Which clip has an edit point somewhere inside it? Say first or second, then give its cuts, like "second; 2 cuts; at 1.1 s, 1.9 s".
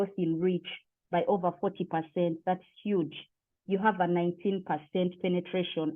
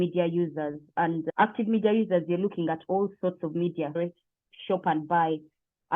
second; 1 cut; at 4.0 s